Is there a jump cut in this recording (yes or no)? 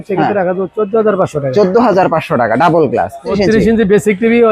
yes